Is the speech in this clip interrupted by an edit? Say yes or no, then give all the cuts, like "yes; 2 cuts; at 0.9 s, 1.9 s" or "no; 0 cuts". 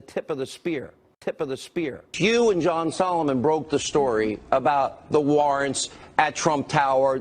yes; 1 cut; at 1.0 s